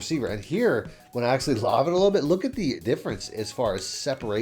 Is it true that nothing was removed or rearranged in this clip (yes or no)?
no